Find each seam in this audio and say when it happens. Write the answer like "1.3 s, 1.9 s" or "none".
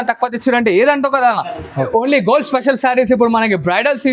1.9 s